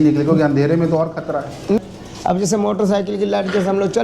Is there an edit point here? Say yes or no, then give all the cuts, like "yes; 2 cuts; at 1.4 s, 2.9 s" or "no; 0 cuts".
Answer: yes; 1 cut; at 1.8 s